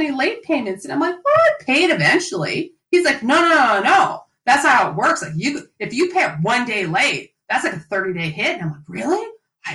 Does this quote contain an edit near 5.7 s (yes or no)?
no